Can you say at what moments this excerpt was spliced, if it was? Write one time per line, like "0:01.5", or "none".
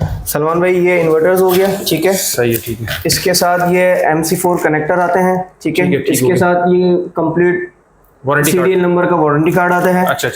none